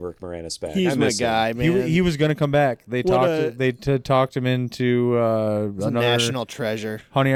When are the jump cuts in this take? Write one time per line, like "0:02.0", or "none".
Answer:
none